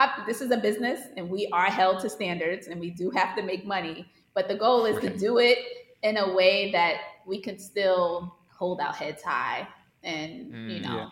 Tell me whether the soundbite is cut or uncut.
cut